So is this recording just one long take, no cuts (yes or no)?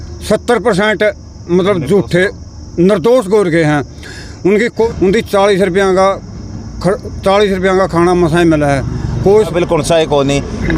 no